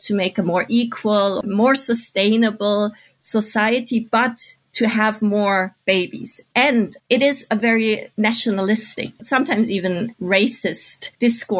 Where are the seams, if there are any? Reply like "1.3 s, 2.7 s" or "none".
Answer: 1.4 s, 6.9 s, 8.1 s, 9.2 s